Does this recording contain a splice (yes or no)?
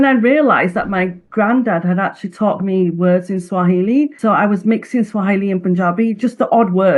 yes